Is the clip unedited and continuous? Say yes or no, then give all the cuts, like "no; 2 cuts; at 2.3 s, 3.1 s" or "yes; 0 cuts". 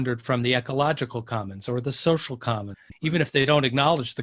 no; 1 cut; at 2.8 s